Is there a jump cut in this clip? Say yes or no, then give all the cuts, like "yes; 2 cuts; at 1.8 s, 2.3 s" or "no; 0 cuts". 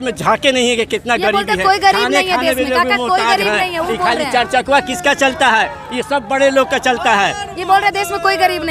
no; 0 cuts